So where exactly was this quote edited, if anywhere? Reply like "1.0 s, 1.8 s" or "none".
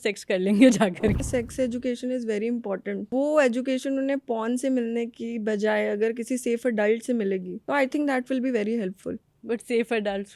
1.2 s, 3.1 s, 7.5 s